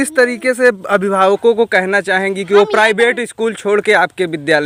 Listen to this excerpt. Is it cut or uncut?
uncut